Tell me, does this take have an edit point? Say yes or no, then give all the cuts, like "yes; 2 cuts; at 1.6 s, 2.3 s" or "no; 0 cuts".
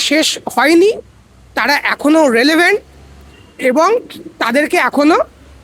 no; 0 cuts